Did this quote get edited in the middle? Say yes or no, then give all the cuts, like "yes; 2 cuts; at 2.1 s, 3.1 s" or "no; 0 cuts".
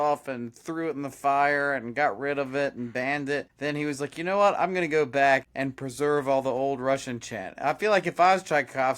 yes; 2 cuts; at 3.5 s, 5.6 s